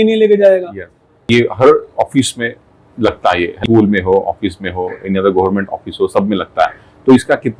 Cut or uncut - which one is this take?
cut